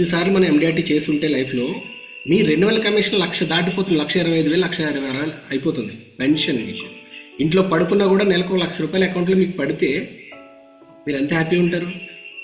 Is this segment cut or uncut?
uncut